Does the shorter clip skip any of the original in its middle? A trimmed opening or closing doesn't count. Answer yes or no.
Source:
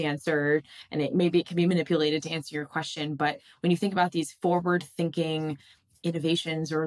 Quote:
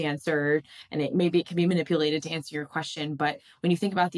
no